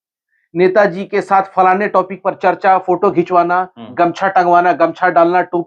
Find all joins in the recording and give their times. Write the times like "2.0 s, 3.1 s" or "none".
none

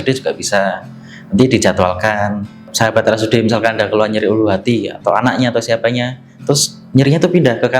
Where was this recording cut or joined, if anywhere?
2.6 s

